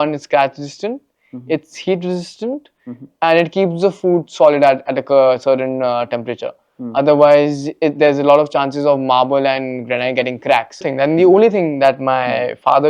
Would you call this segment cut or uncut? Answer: cut